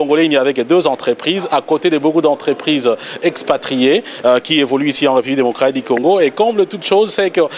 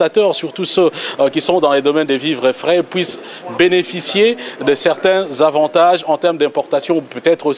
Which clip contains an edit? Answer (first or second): first